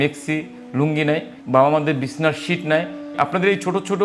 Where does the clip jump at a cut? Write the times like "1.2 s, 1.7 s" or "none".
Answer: 1.3 s, 3.0 s